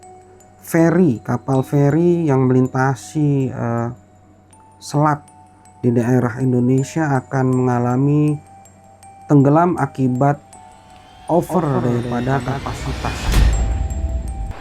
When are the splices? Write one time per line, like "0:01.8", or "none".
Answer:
0:13.3